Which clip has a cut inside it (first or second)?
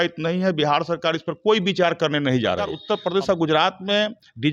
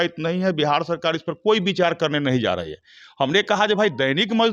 first